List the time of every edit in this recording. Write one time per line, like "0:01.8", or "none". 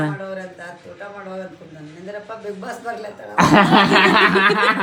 none